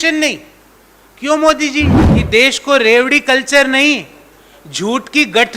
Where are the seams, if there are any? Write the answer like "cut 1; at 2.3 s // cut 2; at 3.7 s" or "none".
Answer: cut 1; at 2.1 s